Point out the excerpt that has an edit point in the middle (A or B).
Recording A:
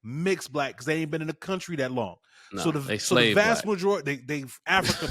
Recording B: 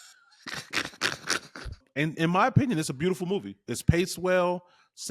B